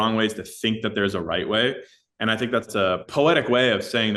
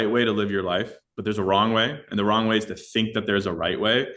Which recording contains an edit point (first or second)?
first